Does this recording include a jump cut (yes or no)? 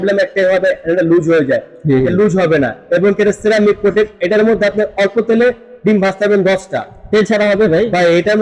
no